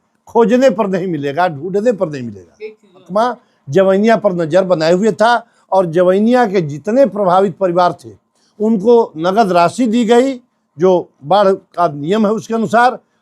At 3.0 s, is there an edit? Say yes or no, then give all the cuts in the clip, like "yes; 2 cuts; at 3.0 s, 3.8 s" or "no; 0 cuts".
yes; 1 cut; at 3.0 s